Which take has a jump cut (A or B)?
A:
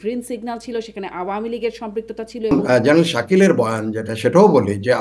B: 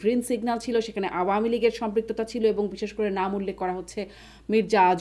A